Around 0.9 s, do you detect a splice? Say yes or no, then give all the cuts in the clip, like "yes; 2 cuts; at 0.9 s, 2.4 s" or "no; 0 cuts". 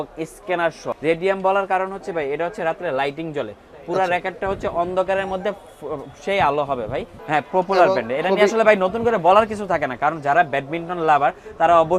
yes; 2 cuts; at 0.9 s, 7.2 s